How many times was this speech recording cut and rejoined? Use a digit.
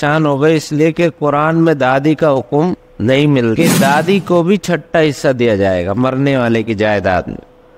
1